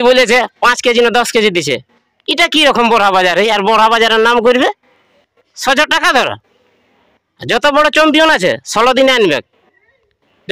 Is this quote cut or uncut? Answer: uncut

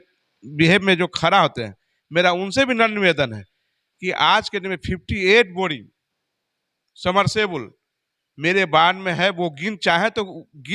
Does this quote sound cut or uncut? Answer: uncut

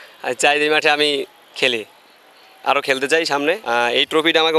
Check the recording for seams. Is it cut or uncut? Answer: cut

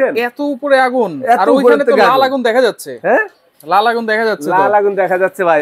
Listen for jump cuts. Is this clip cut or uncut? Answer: uncut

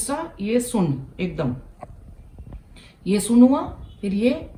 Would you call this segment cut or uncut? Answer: uncut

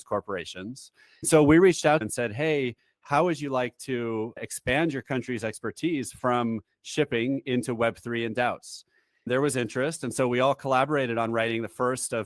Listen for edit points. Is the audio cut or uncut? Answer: cut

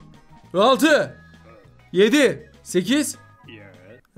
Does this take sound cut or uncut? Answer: uncut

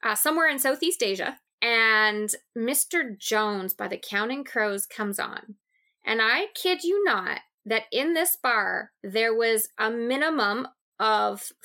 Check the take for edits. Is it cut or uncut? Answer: cut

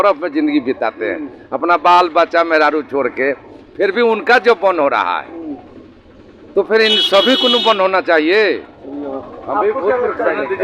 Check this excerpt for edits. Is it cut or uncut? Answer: uncut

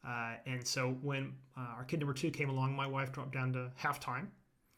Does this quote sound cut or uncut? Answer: uncut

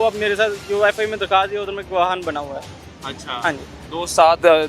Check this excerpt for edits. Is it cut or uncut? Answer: uncut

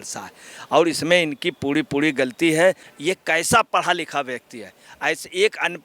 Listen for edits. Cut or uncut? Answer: cut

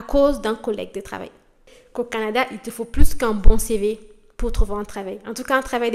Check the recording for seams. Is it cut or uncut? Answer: cut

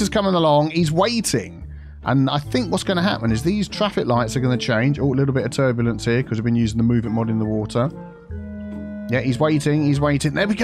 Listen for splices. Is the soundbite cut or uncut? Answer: uncut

